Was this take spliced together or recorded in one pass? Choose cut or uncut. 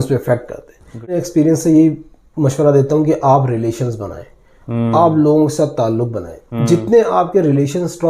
cut